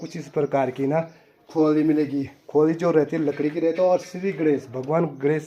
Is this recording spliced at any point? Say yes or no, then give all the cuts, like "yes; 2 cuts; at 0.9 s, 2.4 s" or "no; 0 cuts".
no; 0 cuts